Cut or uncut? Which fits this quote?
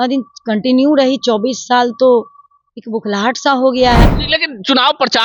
cut